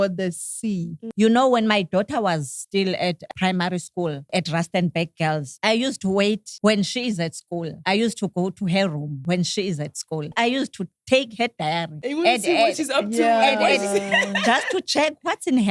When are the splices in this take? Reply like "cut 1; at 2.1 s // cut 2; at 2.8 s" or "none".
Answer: cut 1; at 1.0 s // cut 2; at 3.3 s // cut 3; at 4.3 s // cut 4; at 5.5 s // cut 5; at 6.5 s // cut 6; at 7.7 s // cut 7; at 9.1 s // cut 8; at 10.3 s // cut 9; at 11.9 s